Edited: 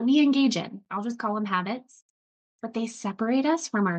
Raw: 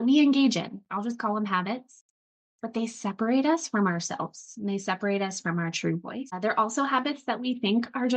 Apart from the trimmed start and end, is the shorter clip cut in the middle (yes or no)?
no